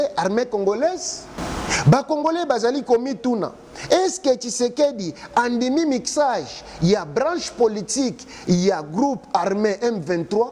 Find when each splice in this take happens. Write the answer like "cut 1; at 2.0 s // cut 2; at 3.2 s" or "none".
cut 1; at 1.4 s